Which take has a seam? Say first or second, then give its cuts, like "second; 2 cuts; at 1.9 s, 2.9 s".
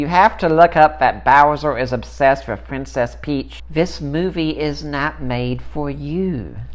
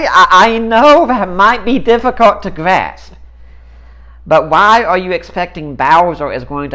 first; 1 cut; at 3.6 s